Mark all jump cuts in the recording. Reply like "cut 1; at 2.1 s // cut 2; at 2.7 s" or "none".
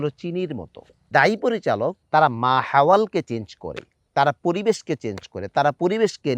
cut 1; at 1.0 s // cut 2; at 2.0 s